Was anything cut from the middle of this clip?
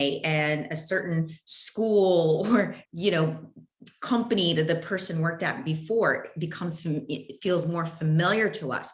yes; 1 cut; at 2.8 s

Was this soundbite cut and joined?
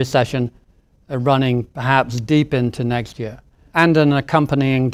yes; 1 cut; at 3.7 s

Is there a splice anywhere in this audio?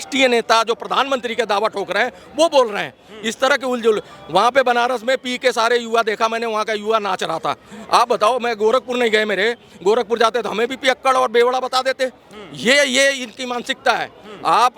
no; 0 cuts

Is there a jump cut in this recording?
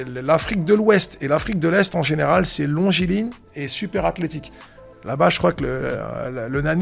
no; 0 cuts

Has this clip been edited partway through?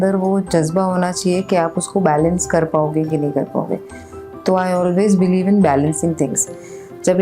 no; 0 cuts

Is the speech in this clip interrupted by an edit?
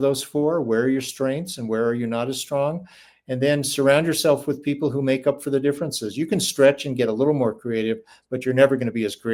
no; 0 cuts

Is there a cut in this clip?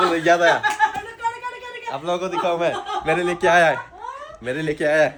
no; 0 cuts

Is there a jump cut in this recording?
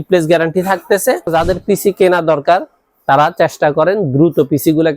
yes; 1 cut; at 1.3 s

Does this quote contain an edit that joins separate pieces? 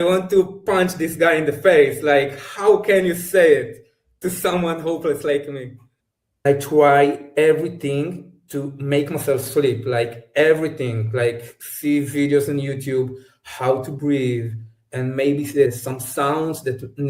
yes; 2 cuts; at 6.4 s, 15.8 s

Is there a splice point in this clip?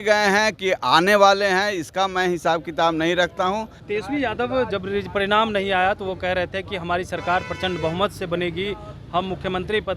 yes; 1 cut; at 3.8 s

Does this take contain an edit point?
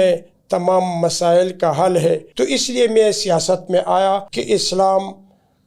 yes; 2 cuts; at 2.3 s, 4.3 s

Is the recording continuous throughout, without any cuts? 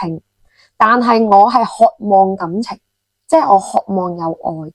yes; 0 cuts

